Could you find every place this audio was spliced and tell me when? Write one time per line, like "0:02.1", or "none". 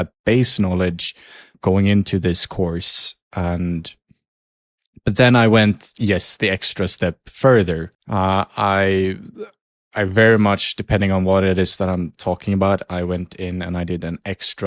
0:01.4
0:07.9